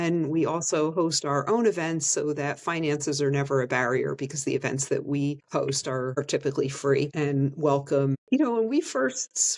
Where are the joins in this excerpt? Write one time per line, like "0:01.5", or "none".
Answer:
0:05.7
0:07.1
0:08.2